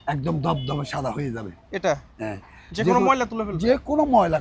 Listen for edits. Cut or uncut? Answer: uncut